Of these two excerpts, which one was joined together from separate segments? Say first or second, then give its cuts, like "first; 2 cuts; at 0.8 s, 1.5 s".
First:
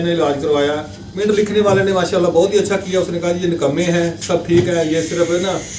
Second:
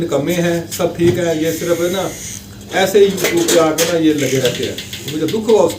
first; 1 cut; at 1.2 s